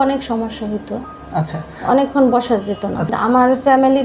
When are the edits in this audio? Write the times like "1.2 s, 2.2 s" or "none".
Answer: 3.1 s